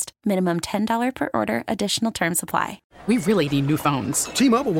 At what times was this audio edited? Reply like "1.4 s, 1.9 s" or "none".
2.8 s